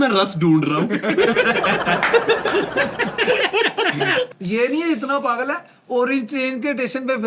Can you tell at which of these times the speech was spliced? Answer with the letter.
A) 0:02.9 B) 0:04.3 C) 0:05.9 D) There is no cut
B